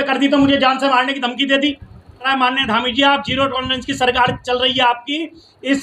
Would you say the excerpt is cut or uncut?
cut